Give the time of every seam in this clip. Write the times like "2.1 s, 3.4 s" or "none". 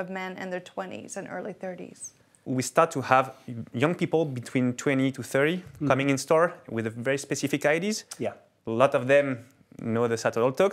2.3 s